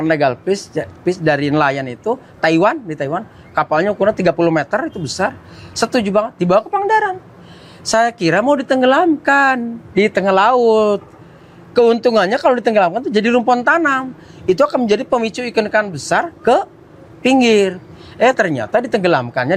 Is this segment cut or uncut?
uncut